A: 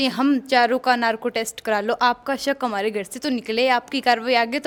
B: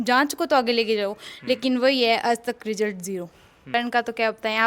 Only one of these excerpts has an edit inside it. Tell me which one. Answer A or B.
B